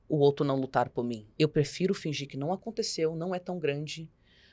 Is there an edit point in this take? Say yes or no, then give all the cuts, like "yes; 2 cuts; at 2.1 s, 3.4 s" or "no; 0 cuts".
yes; 1 cut; at 1.2 s